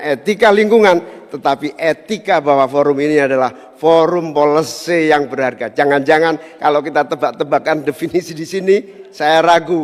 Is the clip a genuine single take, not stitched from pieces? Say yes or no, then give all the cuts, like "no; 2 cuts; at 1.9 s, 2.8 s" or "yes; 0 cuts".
yes; 0 cuts